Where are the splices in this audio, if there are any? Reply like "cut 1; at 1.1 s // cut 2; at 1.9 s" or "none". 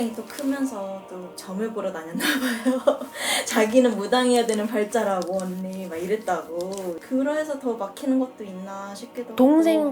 none